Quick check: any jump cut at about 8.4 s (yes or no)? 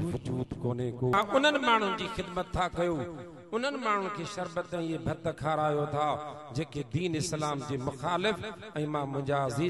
no